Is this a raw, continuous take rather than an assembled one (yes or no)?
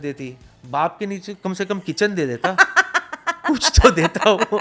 yes